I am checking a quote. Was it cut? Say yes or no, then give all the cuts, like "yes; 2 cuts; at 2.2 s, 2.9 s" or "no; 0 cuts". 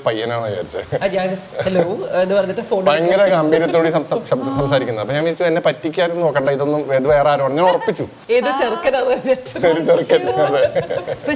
no; 0 cuts